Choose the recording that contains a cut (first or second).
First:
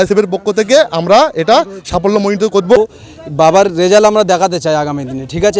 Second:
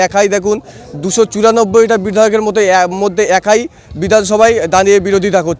first